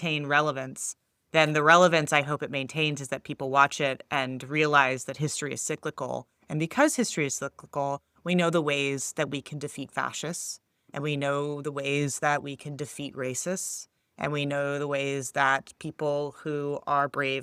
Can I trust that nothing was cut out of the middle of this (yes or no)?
yes